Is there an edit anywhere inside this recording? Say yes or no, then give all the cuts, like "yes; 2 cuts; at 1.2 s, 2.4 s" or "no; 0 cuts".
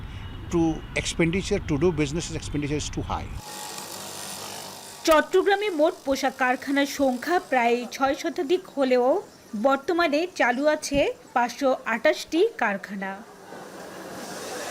no; 0 cuts